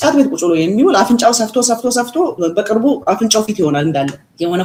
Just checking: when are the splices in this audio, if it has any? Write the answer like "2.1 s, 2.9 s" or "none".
none